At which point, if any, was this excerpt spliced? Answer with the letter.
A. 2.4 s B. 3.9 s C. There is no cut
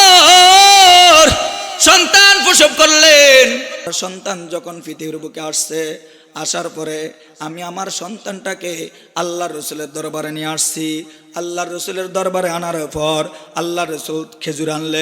B